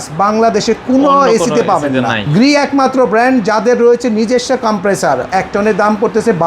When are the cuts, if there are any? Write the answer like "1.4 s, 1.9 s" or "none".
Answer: 2.2 s, 5.3 s